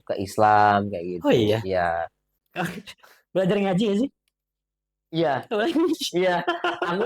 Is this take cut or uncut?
cut